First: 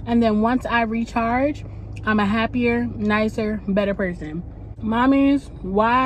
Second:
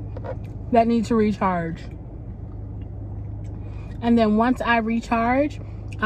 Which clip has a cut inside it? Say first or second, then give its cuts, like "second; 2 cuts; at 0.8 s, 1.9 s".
first; 1 cut; at 4.3 s